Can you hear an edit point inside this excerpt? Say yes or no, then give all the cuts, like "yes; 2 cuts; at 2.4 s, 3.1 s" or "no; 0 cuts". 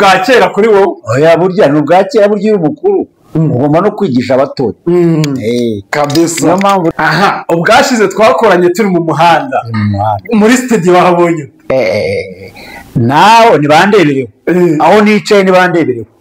yes; 1 cut; at 6.9 s